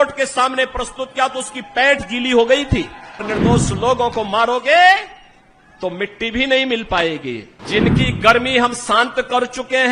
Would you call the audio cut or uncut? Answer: cut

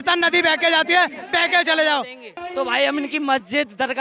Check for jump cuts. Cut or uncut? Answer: cut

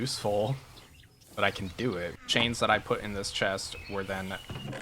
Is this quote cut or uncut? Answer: cut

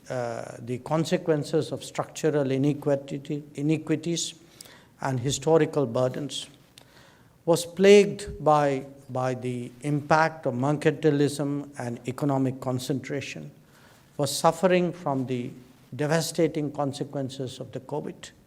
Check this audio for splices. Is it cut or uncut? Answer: uncut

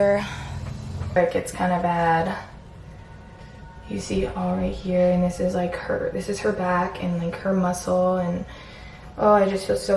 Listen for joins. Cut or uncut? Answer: cut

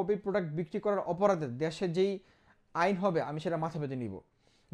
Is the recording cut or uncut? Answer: uncut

